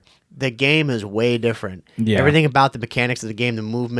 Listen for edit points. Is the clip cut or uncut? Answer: uncut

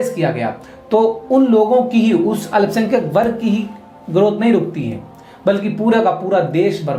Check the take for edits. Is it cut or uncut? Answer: uncut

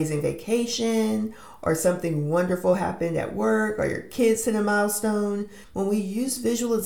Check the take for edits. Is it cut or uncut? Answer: cut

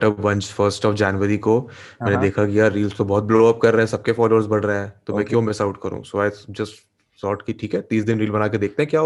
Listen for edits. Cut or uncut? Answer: uncut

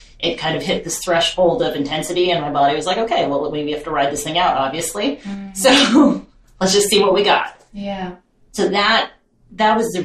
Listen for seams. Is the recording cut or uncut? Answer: cut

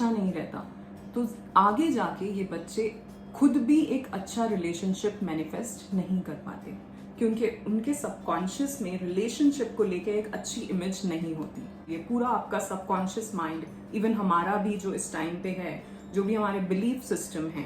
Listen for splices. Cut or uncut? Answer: cut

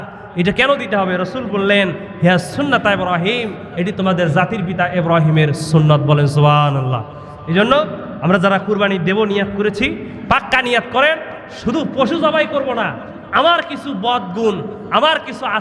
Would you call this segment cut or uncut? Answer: uncut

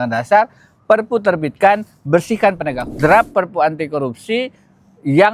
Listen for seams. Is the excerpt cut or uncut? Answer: cut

